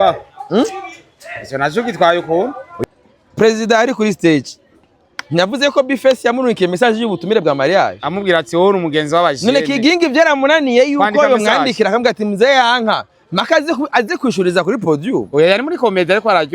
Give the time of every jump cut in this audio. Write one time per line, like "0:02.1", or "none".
0:02.7